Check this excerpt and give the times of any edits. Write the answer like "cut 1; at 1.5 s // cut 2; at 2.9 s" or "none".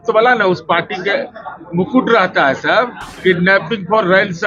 cut 1; at 3.0 s